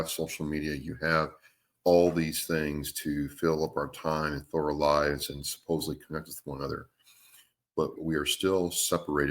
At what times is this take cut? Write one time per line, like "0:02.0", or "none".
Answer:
0:08.0